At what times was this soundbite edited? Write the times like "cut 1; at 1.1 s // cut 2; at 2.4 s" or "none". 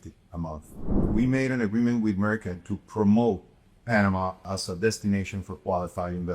cut 1; at 1.0 s // cut 2; at 4.4 s